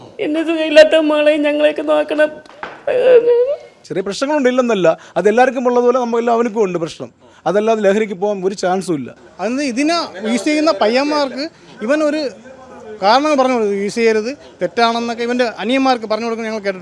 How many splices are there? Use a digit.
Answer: 2